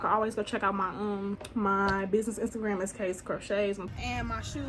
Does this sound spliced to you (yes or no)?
yes